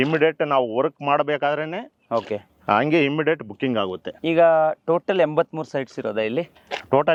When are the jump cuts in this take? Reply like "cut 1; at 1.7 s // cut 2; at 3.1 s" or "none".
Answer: none